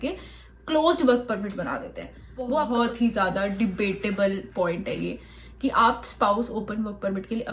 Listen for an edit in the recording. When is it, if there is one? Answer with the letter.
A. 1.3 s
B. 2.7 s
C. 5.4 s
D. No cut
B